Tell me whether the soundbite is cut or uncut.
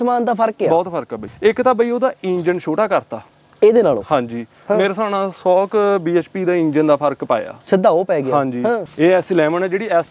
cut